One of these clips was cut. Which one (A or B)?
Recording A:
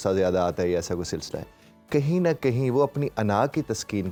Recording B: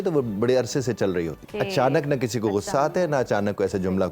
B